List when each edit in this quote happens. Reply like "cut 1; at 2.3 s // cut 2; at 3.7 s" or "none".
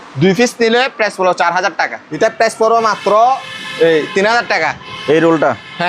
cut 1; at 2.0 s